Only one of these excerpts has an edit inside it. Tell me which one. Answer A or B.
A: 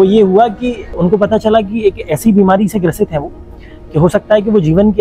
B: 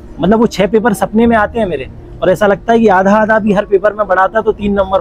A